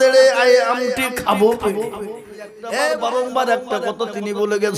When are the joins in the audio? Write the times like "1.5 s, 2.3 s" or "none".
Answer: 2.6 s